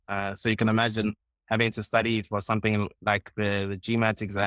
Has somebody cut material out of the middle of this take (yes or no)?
no